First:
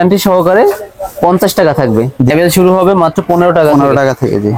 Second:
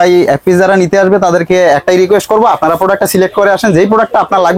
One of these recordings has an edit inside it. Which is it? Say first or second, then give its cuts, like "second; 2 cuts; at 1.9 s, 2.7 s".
first; 1 cut; at 2.3 s